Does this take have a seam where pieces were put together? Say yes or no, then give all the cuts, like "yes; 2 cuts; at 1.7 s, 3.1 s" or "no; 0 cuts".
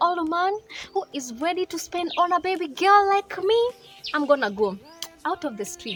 no; 0 cuts